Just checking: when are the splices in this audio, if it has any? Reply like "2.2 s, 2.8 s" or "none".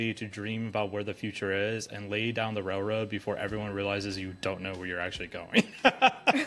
none